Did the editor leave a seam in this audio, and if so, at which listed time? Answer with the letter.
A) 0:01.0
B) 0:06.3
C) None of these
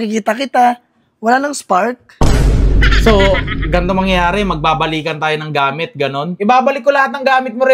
B